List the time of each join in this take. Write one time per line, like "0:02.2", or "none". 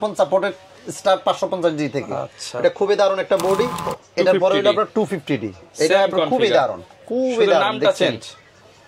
0:04.0

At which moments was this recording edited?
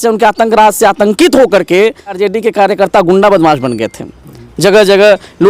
0:02.2

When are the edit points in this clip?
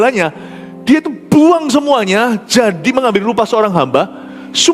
none

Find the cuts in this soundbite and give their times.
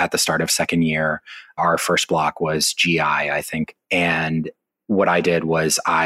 0:01.6

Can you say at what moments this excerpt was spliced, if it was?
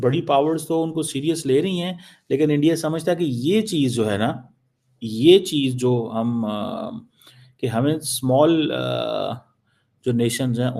none

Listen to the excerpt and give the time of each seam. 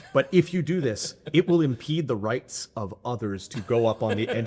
none

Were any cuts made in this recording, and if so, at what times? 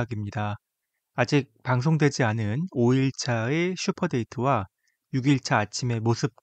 none

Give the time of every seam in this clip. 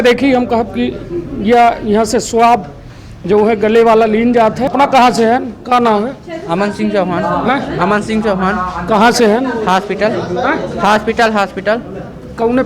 0:04.7

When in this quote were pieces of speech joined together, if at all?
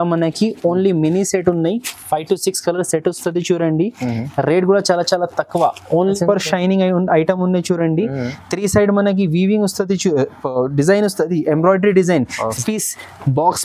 0:06.1
0:12.6

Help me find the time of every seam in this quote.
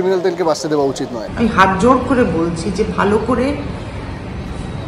0:01.2

